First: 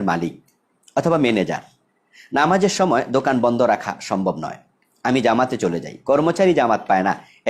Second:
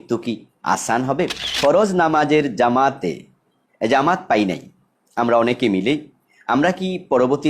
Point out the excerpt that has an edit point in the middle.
second; 1 cut; at 1.4 s

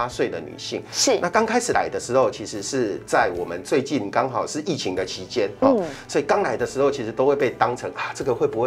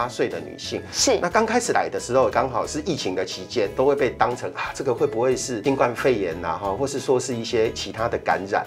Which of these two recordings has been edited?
second; 3 cuts; at 2.3 s, 3.7 s, 5.6 s

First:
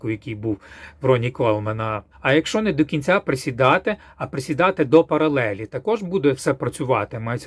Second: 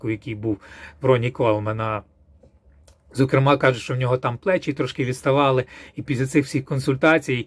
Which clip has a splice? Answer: first; 1 cut; at 2.1 s

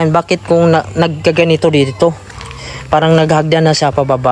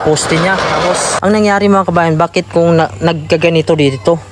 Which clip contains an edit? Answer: second; 1 cut; at 1.1 s

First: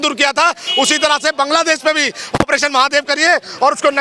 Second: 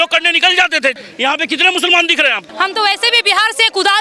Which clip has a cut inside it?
second; 2 cuts; at 1.0 s, 2.4 s

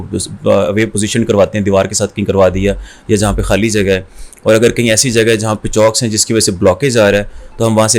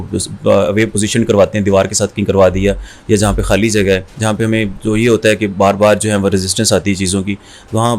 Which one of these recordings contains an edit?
second; 1 cut; at 4.1 s

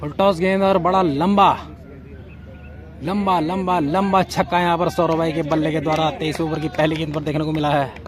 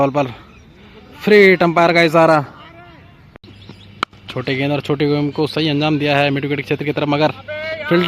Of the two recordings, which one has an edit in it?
second; 1 cut; at 3.1 s

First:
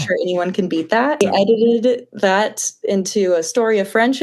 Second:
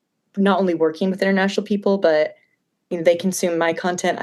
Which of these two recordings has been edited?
first; 1 cut; at 1.2 s

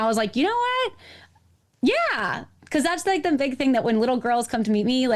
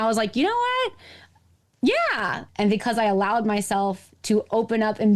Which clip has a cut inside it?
second; 1 cut; at 2.4 s

